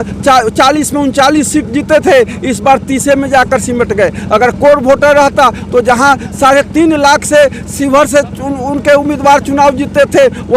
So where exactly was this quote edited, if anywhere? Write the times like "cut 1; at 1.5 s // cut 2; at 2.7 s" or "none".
none